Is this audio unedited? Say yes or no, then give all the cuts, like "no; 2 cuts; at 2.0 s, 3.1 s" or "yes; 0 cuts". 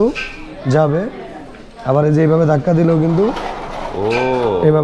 yes; 0 cuts